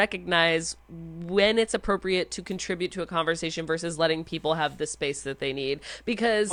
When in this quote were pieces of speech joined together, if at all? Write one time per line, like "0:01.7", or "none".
none